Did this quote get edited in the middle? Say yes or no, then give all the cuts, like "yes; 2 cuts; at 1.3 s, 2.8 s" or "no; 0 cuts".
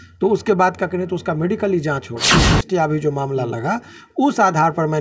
yes; 1 cut; at 2.3 s